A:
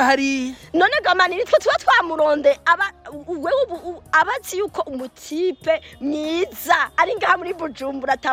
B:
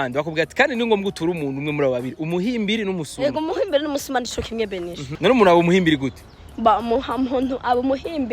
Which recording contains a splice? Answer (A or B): B